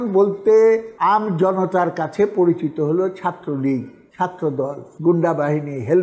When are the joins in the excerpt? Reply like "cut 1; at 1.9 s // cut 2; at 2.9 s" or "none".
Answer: cut 1; at 0.9 s // cut 2; at 4.8 s